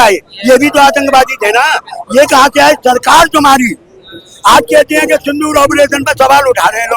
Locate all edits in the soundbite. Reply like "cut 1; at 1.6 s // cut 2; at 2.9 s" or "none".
none